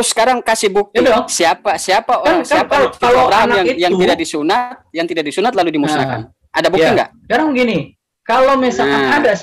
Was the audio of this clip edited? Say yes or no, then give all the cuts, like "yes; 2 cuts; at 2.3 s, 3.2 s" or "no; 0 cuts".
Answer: no; 0 cuts